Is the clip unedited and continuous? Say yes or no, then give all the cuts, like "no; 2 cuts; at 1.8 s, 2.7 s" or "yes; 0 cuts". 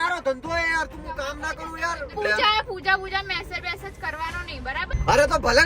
no; 2 cuts; at 2.2 s, 4.9 s